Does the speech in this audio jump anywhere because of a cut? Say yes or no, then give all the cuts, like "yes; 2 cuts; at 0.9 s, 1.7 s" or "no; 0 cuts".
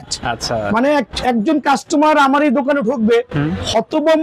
no; 0 cuts